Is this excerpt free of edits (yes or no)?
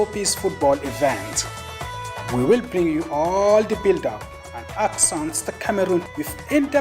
no